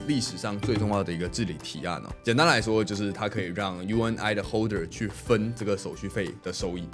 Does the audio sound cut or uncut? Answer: cut